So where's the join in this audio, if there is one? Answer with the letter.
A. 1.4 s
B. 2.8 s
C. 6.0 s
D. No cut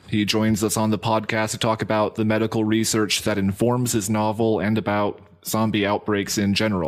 C